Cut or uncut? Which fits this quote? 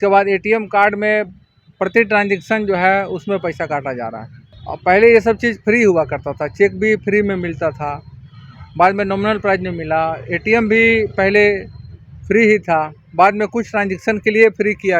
uncut